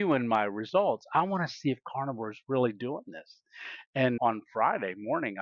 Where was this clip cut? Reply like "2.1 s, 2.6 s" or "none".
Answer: 4.2 s

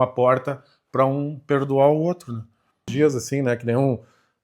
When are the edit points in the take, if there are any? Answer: 2.9 s

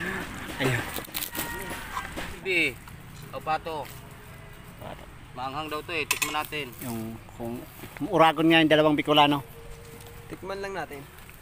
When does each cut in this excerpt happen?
2.4 s

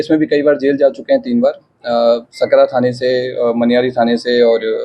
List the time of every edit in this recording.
none

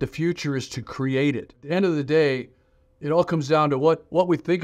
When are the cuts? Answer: 1.6 s

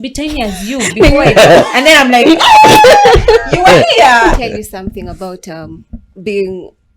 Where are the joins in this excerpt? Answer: 4.3 s

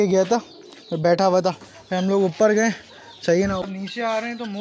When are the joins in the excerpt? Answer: 3.7 s

